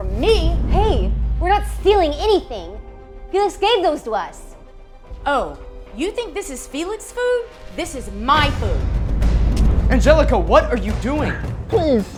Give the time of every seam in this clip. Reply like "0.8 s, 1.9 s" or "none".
none

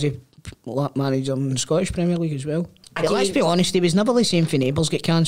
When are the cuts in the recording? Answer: 2.8 s

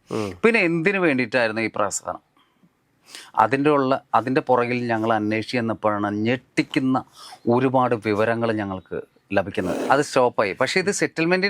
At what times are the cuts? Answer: 9.8 s

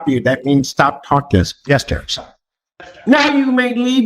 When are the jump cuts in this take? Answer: 2.4 s

